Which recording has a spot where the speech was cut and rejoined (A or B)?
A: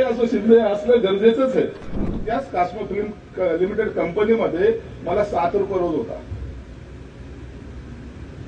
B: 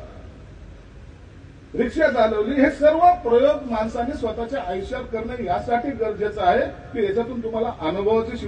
A